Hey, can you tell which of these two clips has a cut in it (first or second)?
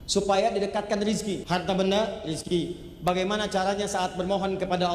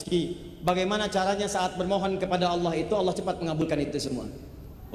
first